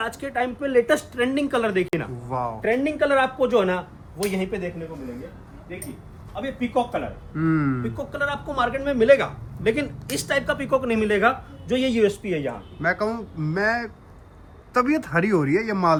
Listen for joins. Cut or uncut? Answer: uncut